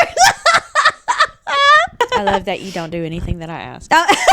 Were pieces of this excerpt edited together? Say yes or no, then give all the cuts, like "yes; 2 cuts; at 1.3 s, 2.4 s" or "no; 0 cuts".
yes; 1 cut; at 2.0 s